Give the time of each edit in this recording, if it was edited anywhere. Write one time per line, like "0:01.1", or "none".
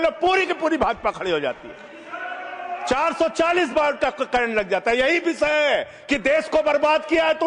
none